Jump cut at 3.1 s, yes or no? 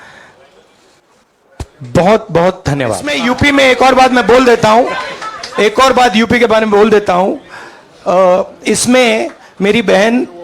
yes